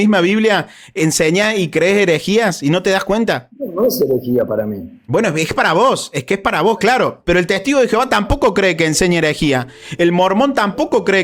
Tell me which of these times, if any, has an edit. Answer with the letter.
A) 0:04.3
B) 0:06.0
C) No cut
C